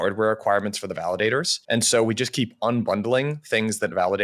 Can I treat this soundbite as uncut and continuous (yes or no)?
no